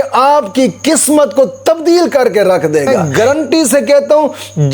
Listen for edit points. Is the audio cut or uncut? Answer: cut